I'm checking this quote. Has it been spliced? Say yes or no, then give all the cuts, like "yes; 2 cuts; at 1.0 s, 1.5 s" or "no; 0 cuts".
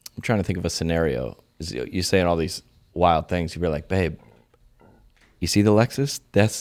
no; 0 cuts